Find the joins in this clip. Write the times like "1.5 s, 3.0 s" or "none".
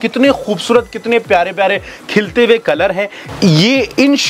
3.2 s